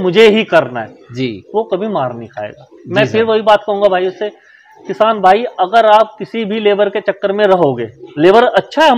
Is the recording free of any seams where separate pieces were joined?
yes; 0 cuts

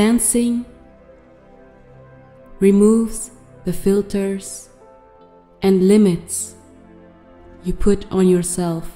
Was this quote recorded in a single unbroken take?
yes; 0 cuts

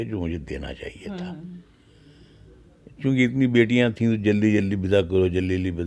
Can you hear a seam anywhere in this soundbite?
no; 0 cuts

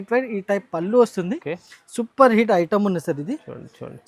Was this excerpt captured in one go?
yes; 0 cuts

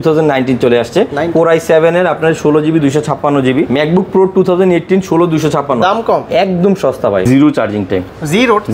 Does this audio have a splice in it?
yes; 3 cuts; at 3.7 s, 6.3 s, 7.2 s

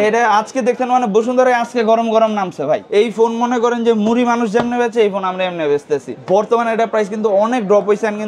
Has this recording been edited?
yes; 2 cuts; at 2.8 s, 6.1 s

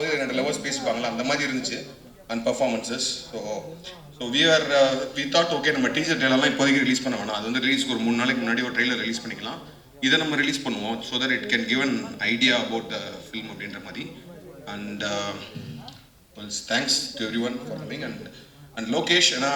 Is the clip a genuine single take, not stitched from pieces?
yes; 0 cuts

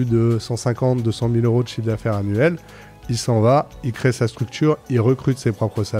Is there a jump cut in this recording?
no; 0 cuts

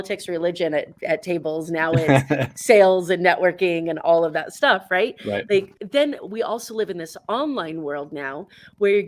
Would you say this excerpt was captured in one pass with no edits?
no; 1 cut; at 5.8 s

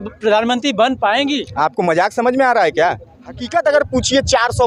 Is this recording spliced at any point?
yes; 1 cut; at 3.5 s

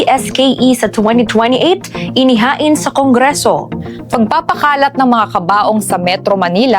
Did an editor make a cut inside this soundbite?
yes; 1 cut; at 3.7 s

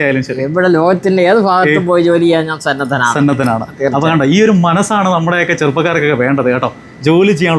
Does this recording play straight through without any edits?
yes; 0 cuts

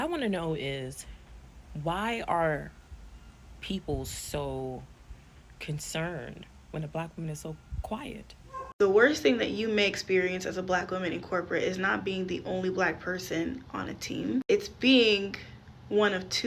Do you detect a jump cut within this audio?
yes; 1 cut; at 8.6 s

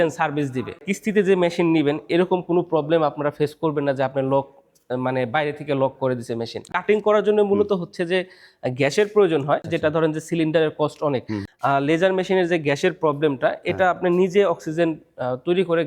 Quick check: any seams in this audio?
yes; 4 cuts; at 0.9 s, 6.7 s, 9.7 s, 11.4 s

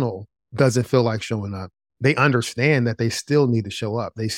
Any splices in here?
yes; 1 cut; at 2.3 s

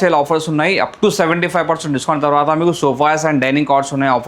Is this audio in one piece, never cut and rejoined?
yes; 0 cuts

